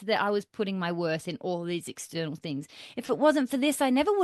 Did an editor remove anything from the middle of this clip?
no; 0 cuts

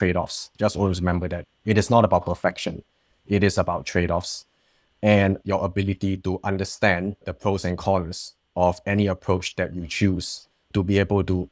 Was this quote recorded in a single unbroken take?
no; 2 cuts; at 5.4 s, 7.2 s

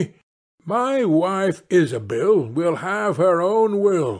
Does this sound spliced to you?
no; 0 cuts

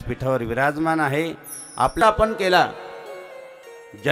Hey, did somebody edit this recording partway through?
yes; 1 cut; at 2.0 s

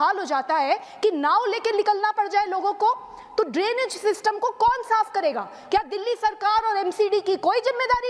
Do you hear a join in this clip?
no; 0 cuts

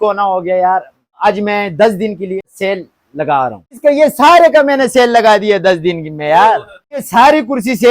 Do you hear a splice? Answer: yes; 4 cuts; at 1.1 s, 2.4 s, 3.8 s, 7.1 s

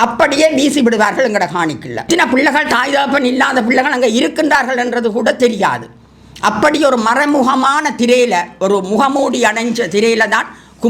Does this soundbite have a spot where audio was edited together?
yes; 1 cut; at 2.1 s

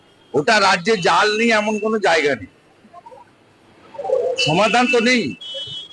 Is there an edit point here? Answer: no; 0 cuts

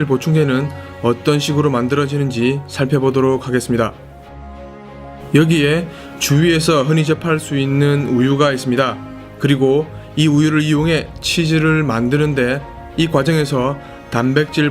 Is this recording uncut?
no; 1 cut; at 3.0 s

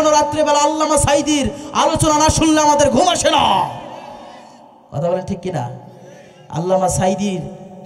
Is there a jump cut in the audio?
no; 0 cuts

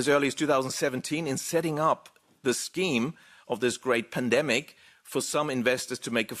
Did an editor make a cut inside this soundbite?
no; 0 cuts

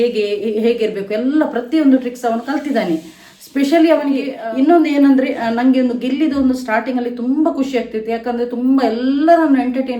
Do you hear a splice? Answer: yes; 1 cut; at 4.3 s

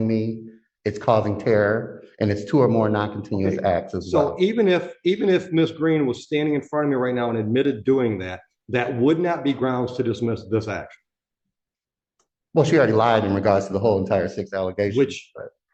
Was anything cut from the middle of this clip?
no; 0 cuts

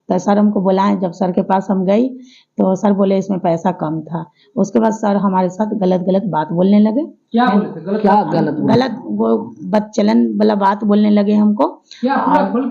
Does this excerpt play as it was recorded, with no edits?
yes; 0 cuts

